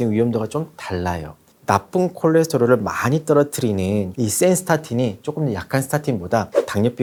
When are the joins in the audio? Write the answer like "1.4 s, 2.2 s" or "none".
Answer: none